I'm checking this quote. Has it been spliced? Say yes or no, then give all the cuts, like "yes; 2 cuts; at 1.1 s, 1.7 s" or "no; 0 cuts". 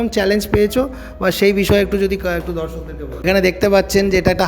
yes; 1 cut; at 3.2 s